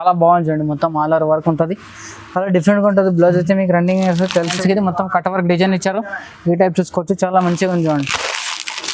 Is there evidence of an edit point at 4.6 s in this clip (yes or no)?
yes